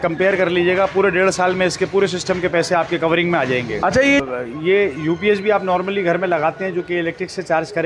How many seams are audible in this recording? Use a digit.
1